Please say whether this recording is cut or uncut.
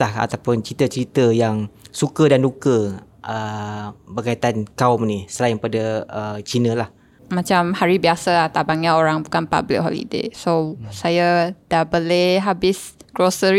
cut